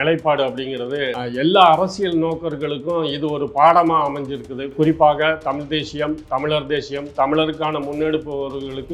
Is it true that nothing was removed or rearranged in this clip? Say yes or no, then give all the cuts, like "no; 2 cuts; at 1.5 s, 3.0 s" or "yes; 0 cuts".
no; 1 cut; at 1.2 s